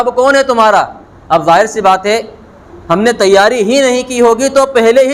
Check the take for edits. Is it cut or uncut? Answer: uncut